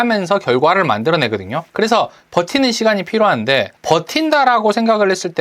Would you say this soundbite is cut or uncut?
cut